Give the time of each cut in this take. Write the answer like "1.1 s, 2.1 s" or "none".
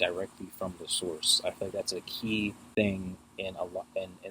2.6 s

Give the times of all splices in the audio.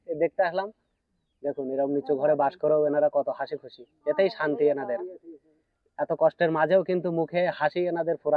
none

